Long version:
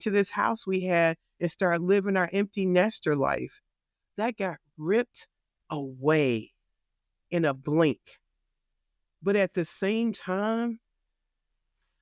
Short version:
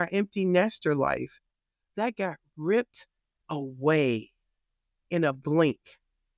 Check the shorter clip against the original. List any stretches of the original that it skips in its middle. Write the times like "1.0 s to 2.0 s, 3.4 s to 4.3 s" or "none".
none